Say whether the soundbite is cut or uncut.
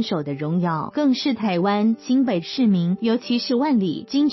uncut